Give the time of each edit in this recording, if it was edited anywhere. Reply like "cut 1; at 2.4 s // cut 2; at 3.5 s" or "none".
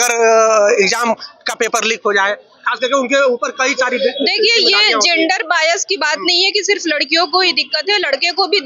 none